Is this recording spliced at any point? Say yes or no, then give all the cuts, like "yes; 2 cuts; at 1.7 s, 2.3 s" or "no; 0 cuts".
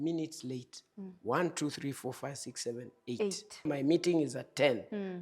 yes; 1 cut; at 3.7 s